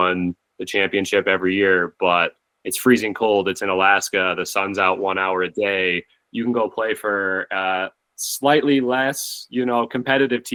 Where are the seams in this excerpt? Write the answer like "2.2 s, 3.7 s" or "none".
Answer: none